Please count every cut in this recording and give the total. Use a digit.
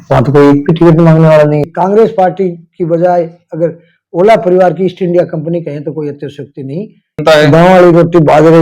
2